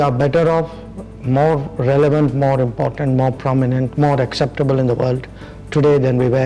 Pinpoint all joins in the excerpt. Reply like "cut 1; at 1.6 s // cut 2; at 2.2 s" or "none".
none

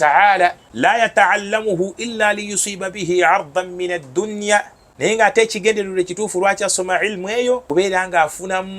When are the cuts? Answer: cut 1; at 1.0 s // cut 2; at 5.1 s // cut 3; at 7.6 s

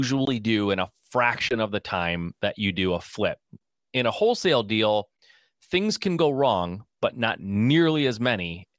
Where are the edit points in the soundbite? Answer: none

